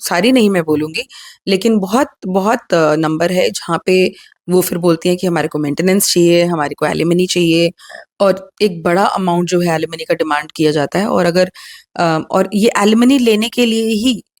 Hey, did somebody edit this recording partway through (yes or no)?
no